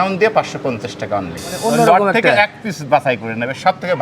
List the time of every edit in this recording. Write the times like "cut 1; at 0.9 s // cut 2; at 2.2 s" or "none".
cut 1; at 1.4 s

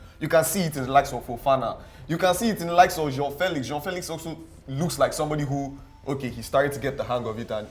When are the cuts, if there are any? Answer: none

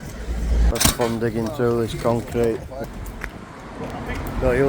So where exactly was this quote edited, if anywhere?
cut 1; at 2.8 s

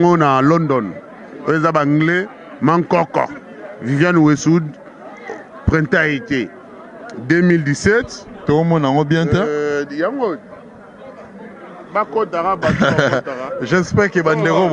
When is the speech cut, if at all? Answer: none

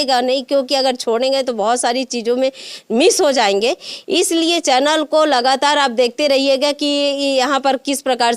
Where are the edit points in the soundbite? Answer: none

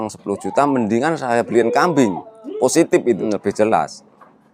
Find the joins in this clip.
cut 1; at 3.2 s

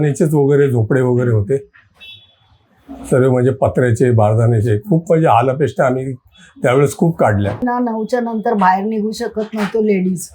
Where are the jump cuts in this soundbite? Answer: cut 1; at 7.6 s

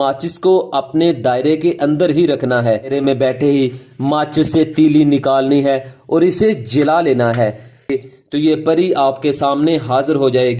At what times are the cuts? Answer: cut 1; at 2.9 s // cut 2; at 7.9 s

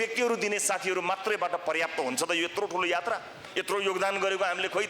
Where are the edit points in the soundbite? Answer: cut 1; at 3.5 s

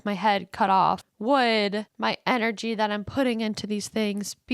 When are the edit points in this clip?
cut 1; at 1.1 s // cut 2; at 1.9 s

